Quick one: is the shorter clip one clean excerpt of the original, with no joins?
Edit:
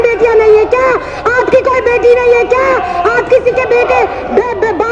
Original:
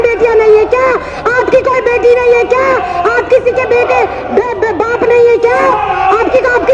yes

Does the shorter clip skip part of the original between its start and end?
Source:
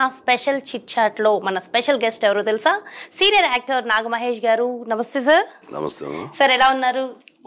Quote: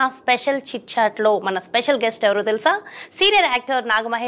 no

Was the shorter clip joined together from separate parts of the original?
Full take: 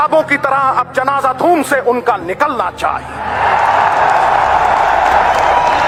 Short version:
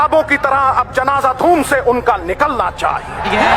no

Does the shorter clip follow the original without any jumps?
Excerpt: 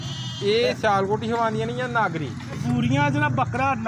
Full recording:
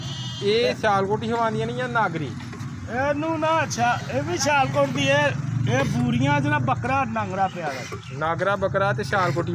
no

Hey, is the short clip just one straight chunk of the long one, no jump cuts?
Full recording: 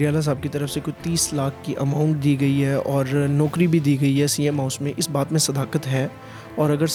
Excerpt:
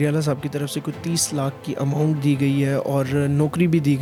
yes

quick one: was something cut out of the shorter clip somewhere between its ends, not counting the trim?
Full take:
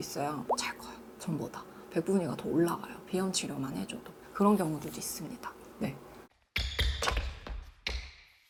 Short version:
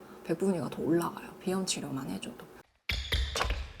yes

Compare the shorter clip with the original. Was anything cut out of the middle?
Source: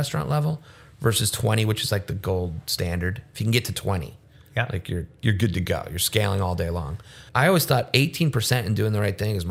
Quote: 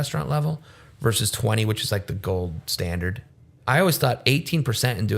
yes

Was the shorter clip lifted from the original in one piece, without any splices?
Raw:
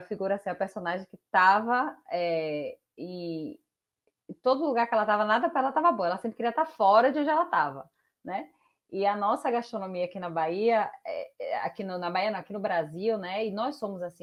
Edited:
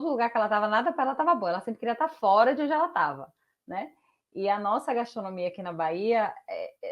yes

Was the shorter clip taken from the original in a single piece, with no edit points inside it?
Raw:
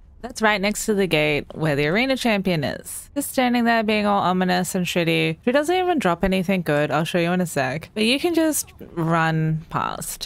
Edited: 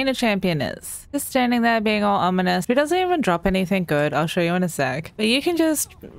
no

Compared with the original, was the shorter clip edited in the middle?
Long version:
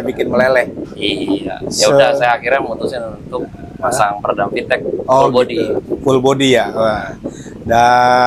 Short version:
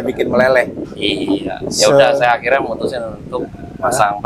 no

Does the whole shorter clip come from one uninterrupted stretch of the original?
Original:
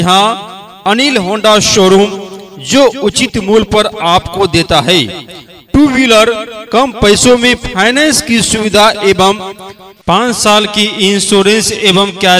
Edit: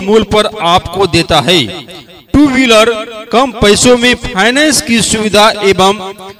yes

